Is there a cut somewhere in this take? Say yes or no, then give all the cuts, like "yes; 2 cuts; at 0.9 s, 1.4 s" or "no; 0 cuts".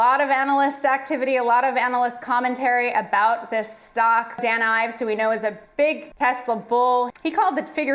yes; 3 cuts; at 4.4 s, 6.1 s, 7.1 s